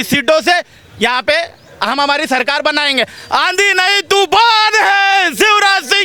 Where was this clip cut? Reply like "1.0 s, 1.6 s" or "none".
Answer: none